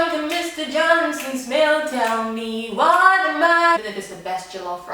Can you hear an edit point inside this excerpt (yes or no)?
yes